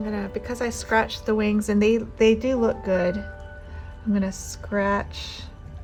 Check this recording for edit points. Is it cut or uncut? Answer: uncut